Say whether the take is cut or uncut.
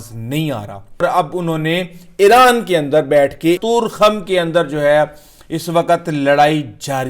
cut